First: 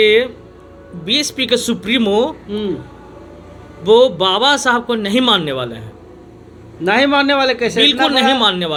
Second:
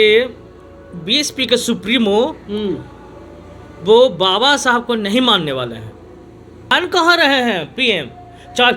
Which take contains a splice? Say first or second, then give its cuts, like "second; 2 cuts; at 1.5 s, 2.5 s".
second; 1 cut; at 6.7 s